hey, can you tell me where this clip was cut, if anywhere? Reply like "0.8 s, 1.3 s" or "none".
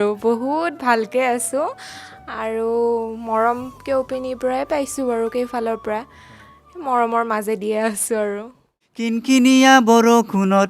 9.2 s